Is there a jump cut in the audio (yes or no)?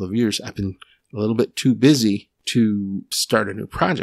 yes